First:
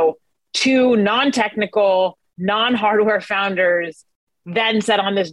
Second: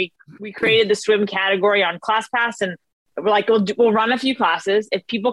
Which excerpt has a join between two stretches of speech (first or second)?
second